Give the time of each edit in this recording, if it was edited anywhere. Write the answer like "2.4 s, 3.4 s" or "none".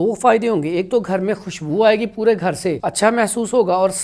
2.8 s